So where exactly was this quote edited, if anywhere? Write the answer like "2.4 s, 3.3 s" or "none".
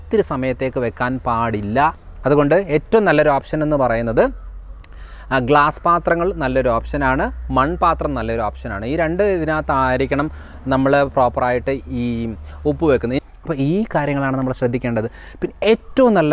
2.0 s, 13.2 s